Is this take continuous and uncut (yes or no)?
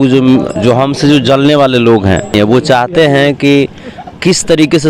no